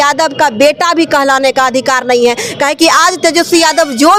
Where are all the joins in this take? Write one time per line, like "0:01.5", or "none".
none